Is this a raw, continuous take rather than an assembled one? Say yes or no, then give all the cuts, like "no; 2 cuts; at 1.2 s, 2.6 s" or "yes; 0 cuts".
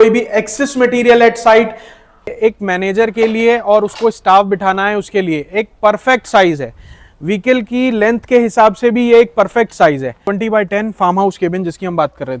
no; 2 cuts; at 2.4 s, 10.3 s